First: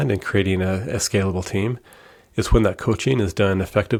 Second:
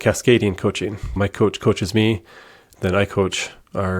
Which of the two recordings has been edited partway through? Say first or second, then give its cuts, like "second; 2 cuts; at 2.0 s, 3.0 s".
second; 1 cut; at 1.1 s